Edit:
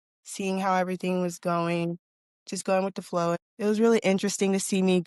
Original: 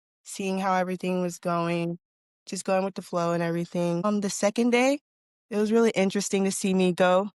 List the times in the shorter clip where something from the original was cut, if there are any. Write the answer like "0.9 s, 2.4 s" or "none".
3.4 s